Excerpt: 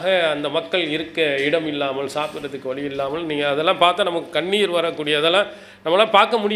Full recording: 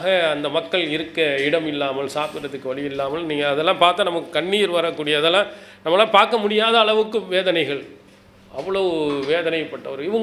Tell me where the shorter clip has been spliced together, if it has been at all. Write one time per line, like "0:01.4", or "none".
none

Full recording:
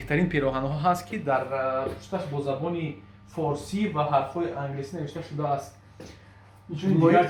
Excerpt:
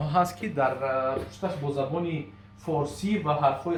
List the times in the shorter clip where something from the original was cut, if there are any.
none

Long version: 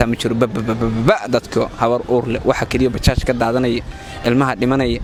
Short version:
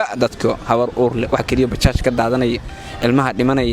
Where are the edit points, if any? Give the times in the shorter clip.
0:01.3

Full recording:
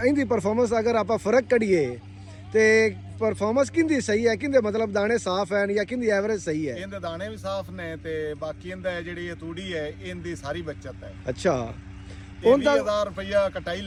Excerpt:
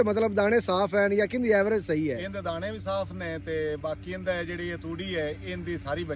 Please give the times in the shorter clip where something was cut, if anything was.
none

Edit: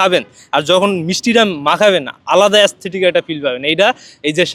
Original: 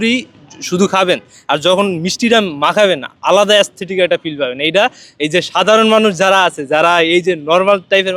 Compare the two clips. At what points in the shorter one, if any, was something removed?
none

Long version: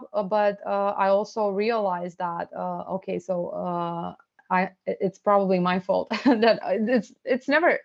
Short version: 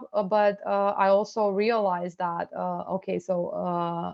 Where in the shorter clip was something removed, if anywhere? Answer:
none

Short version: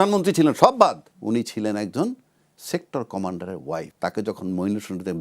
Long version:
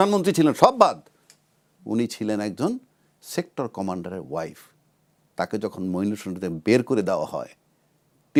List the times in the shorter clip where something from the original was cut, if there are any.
0:01.1
0:03.9

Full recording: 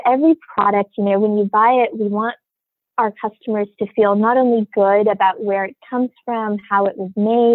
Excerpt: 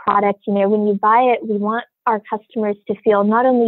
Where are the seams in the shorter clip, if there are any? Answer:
0:01.9

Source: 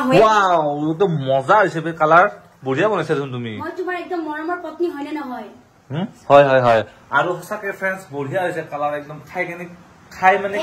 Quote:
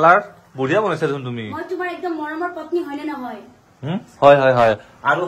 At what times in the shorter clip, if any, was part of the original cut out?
none

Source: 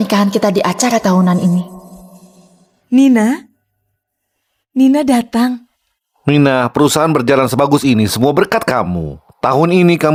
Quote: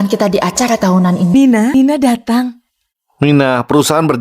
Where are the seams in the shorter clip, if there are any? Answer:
0:01.5

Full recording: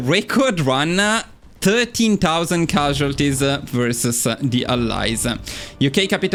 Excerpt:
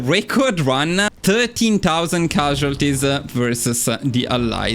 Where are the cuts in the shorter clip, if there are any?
0:01.1

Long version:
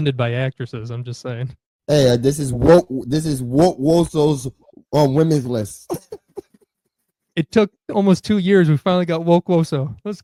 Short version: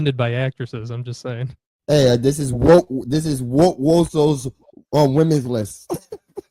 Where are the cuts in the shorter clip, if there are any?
none

